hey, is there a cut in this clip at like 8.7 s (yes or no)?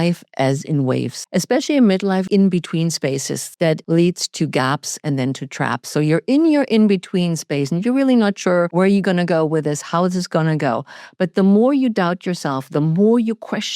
yes